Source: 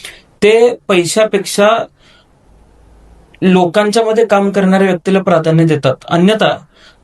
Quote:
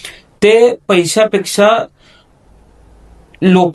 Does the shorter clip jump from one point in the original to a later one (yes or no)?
no